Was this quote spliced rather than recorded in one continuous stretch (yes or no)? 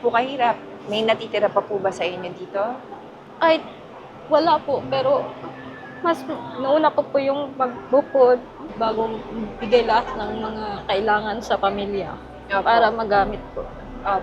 yes